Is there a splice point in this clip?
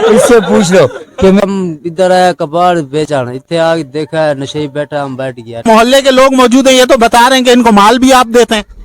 yes; 2 cuts; at 1.4 s, 5.6 s

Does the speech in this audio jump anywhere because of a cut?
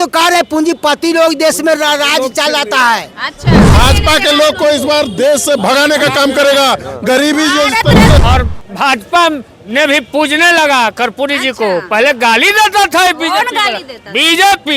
yes; 2 cuts; at 3.8 s, 8.2 s

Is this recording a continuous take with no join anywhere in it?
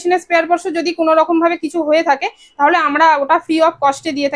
yes; 0 cuts

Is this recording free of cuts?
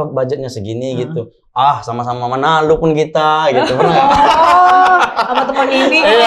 yes; 0 cuts

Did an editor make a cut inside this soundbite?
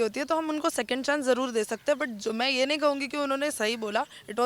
no; 0 cuts

